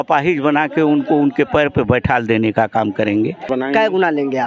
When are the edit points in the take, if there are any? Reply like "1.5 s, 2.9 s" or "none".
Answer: 3.5 s